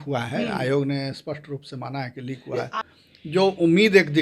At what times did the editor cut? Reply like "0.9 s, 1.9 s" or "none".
2.8 s